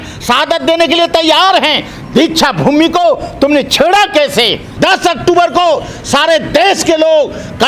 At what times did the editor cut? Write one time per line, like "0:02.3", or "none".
0:04.6